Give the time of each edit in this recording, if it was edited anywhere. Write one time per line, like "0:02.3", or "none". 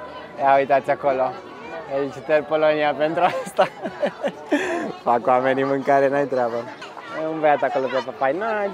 none

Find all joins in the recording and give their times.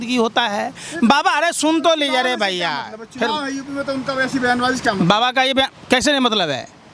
none

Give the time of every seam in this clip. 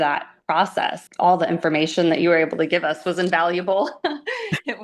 0:01.0

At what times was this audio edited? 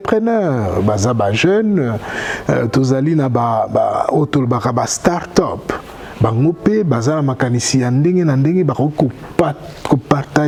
none

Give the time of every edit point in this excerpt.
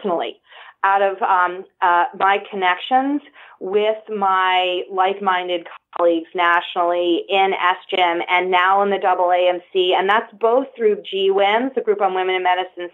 none

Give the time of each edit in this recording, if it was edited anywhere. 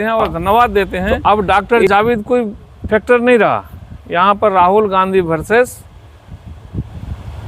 0:01.0

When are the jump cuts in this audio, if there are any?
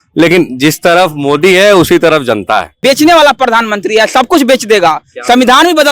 0:02.8

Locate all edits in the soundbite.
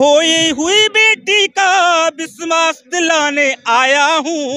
none

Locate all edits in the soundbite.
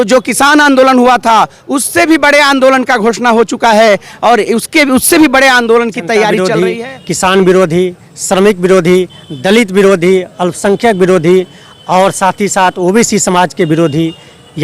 0:06.5

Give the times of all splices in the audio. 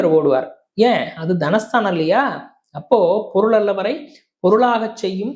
none

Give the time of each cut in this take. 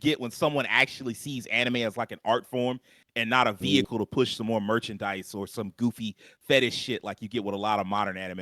none

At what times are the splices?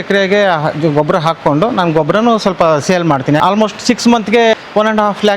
0:03.4
0:04.5

